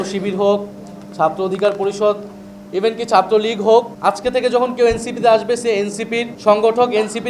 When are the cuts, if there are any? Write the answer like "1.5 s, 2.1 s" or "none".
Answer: 3.9 s, 6.3 s